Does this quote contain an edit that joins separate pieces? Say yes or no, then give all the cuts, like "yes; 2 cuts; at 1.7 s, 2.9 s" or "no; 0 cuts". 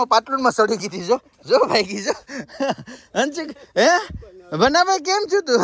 no; 0 cuts